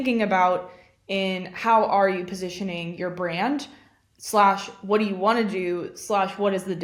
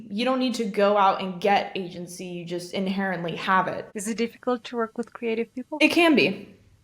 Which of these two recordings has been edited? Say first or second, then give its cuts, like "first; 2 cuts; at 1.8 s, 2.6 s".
second; 2 cuts; at 3.9 s, 5.7 s